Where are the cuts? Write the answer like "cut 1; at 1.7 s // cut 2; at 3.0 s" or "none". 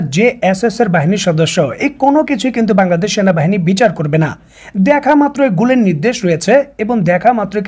none